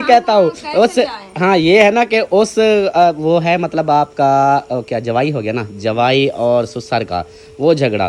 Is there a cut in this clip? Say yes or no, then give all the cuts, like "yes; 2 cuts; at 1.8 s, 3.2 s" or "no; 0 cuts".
no; 0 cuts